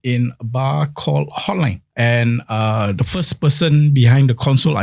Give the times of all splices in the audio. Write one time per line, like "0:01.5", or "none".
0:01.8